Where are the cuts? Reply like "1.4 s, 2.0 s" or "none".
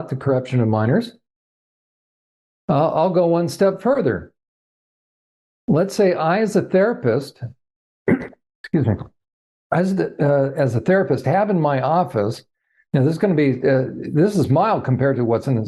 none